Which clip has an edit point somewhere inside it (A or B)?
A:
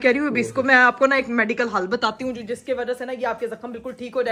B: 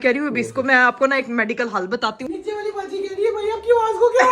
B